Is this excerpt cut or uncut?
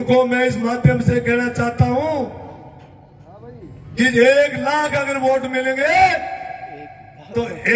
uncut